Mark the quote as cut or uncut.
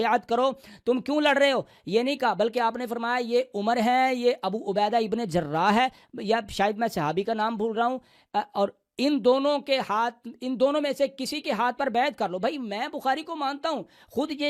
uncut